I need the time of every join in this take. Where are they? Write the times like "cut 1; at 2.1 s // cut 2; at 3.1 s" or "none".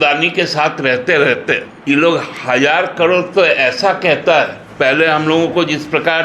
cut 1; at 1.7 s // cut 2; at 4.6 s